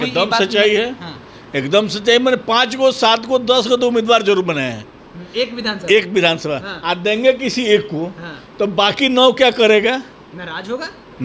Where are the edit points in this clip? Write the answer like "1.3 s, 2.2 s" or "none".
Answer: none